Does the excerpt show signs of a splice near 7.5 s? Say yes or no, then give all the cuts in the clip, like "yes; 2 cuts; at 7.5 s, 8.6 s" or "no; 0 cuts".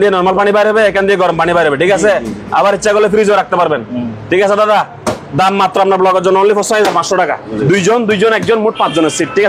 yes; 1 cut; at 7.5 s